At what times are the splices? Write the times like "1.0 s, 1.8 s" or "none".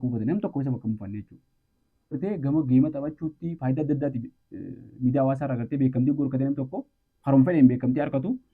2.2 s